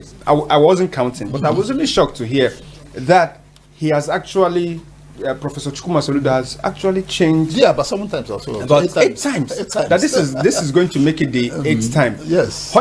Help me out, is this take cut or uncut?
uncut